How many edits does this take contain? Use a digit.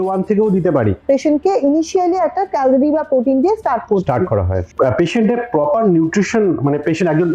2